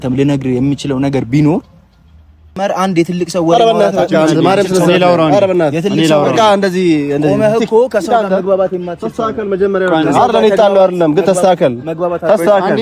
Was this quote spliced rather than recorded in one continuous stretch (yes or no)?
yes